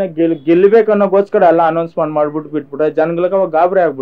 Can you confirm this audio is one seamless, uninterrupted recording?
yes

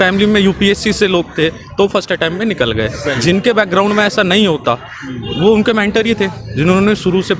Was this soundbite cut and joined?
no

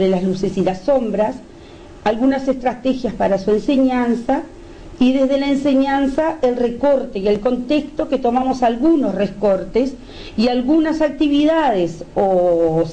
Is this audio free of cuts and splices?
no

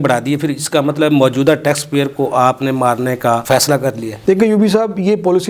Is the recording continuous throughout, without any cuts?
yes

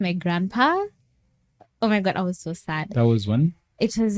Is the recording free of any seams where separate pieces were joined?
yes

